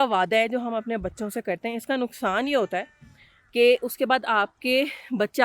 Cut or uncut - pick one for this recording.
uncut